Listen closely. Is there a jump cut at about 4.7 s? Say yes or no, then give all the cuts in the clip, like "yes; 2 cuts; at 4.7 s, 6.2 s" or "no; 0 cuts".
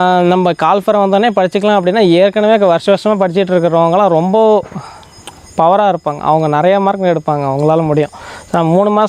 no; 0 cuts